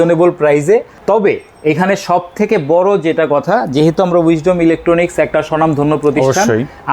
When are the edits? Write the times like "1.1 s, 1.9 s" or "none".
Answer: none